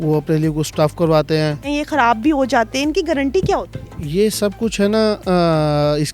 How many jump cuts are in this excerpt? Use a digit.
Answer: 1